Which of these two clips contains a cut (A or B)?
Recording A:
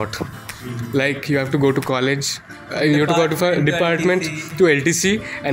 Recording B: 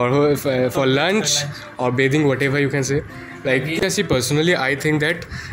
B